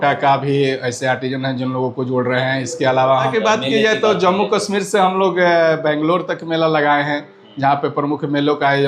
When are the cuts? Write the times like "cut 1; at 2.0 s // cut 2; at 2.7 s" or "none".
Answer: cut 1; at 3.3 s